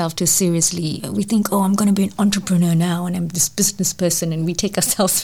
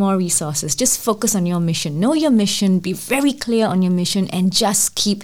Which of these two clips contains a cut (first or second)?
first